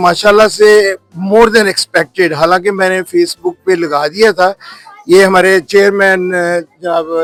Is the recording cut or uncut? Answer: uncut